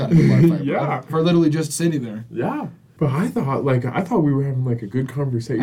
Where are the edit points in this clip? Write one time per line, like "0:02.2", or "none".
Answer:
0:02.8